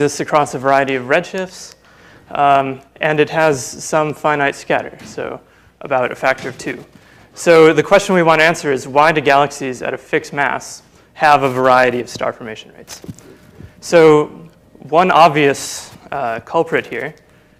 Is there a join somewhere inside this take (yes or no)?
no